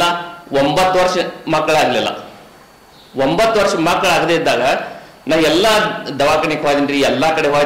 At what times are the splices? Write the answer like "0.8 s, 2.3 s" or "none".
none